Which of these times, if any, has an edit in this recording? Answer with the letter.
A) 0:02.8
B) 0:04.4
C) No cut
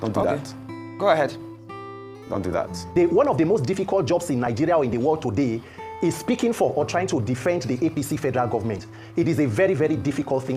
A